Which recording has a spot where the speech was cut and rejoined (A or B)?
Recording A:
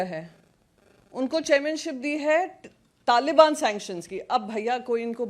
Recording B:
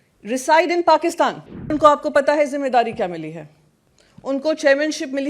B